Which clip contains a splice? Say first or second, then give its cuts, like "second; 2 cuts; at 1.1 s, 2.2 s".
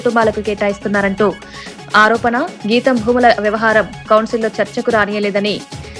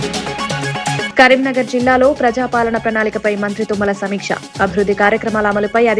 second; 1 cut; at 1.1 s